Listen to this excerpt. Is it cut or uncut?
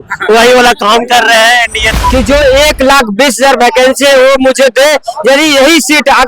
cut